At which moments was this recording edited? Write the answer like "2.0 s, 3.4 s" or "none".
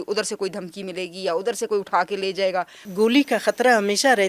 2.9 s